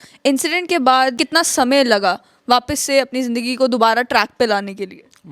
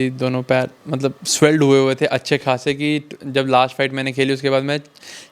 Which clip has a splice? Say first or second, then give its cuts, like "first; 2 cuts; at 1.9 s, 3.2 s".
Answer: first; 1 cut; at 1.2 s